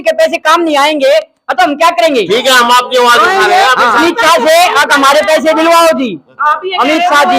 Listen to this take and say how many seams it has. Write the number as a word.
one